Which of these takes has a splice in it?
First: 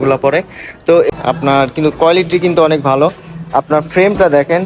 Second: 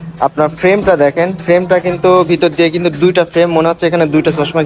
first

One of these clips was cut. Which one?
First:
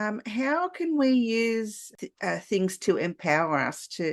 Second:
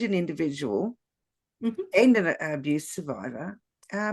first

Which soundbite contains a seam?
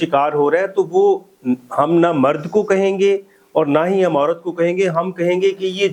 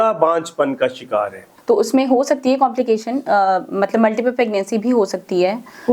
second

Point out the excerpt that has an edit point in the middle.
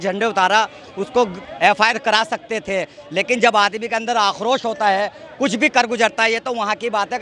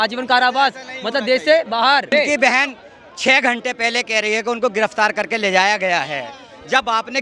second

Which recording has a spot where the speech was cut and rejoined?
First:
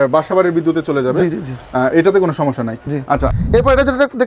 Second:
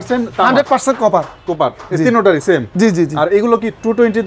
first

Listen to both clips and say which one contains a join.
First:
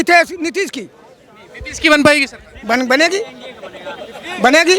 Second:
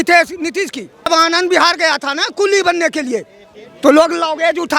second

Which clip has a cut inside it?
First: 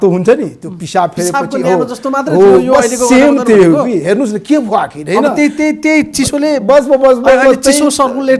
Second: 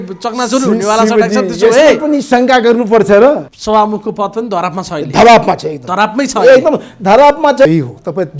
second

